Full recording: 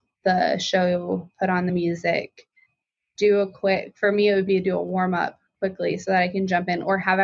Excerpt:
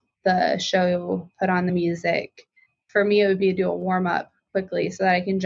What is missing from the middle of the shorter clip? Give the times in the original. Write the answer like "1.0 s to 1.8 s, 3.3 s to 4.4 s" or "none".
2.8 s to 3.9 s